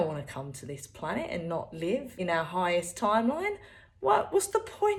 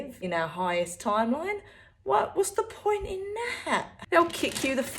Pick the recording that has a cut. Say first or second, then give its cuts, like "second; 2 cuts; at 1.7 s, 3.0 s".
second; 1 cut; at 4.0 s